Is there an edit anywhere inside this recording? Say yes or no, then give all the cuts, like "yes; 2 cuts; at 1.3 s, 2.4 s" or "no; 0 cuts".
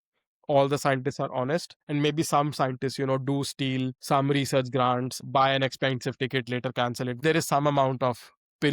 yes; 4 cuts; at 1.8 s, 4.0 s, 5.1 s, 7.2 s